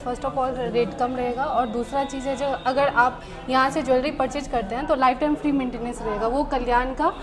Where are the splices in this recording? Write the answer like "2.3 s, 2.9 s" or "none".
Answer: none